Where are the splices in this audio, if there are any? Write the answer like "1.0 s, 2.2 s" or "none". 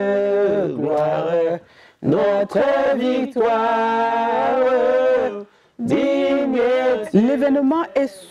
7.0 s